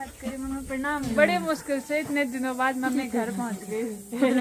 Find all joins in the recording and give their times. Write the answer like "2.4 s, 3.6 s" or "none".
none